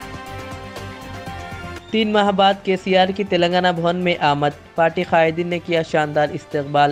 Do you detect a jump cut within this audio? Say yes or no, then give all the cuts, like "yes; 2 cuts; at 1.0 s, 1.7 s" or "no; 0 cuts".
no; 0 cuts